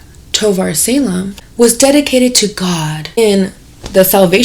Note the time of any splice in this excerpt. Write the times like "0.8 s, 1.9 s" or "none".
1.5 s